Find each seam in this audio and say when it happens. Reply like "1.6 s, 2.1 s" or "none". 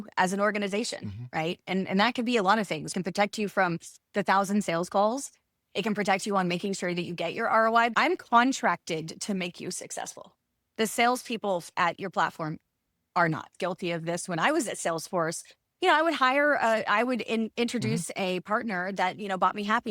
2.9 s, 7.9 s, 13.5 s